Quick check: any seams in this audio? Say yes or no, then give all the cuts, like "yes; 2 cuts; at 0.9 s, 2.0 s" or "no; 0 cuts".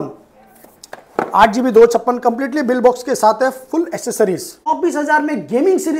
yes; 1 cut; at 4.5 s